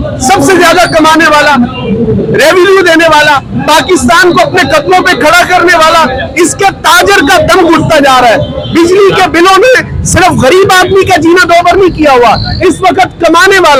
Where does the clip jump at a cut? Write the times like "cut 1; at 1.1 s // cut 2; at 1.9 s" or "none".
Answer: none

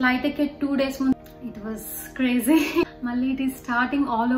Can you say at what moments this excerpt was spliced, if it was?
cut 1; at 1.1 s // cut 2; at 2.8 s

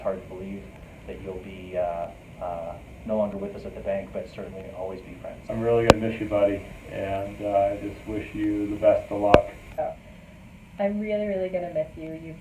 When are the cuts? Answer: cut 1; at 5.4 s // cut 2; at 9.7 s

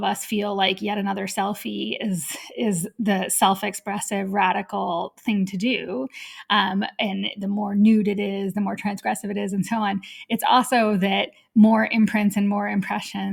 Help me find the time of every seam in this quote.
none

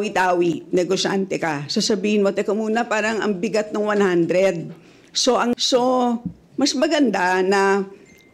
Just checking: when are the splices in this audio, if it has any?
cut 1; at 5.6 s

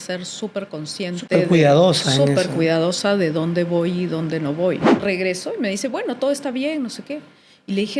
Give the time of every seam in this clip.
cut 1; at 4.9 s

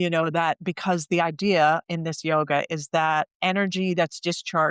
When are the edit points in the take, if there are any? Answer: none

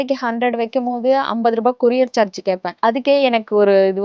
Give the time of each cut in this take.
cut 1; at 2.7 s

